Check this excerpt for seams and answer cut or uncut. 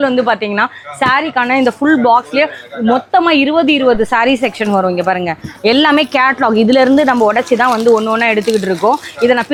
uncut